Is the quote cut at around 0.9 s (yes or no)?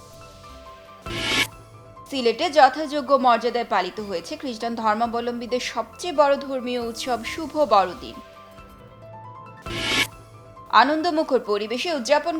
yes